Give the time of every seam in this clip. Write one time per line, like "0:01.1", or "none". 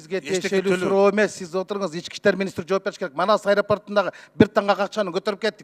none